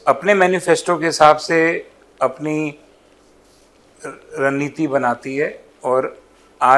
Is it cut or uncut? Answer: uncut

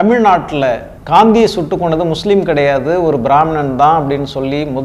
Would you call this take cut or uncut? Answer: cut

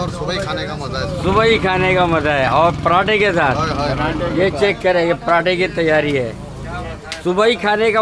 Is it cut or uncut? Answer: uncut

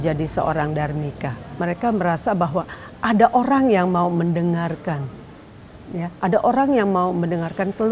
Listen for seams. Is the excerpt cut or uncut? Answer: cut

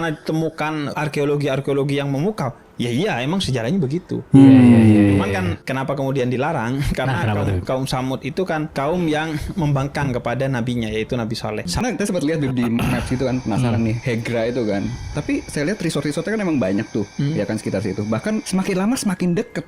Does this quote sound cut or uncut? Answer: cut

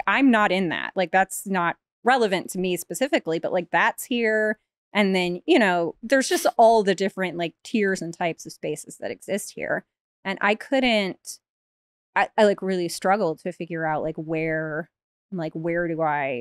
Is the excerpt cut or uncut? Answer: uncut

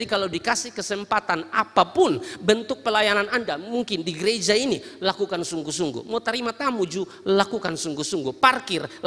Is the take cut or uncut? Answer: uncut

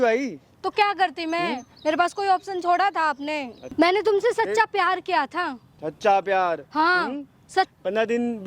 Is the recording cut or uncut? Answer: cut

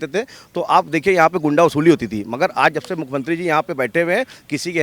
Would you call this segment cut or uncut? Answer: uncut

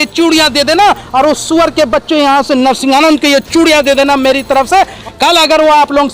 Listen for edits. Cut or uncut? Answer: cut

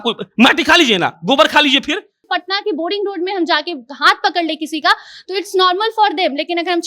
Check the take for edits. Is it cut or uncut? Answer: cut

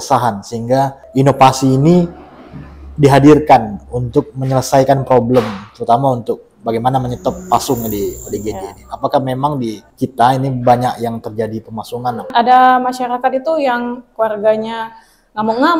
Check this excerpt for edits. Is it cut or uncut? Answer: cut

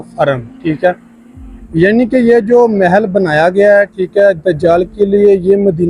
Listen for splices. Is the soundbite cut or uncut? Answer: uncut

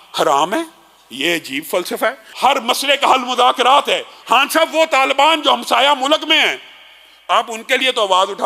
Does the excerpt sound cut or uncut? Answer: cut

